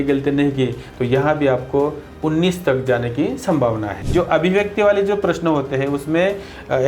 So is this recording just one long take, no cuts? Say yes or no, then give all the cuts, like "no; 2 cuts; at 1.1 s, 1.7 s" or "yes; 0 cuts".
no; 1 cut; at 3.9 s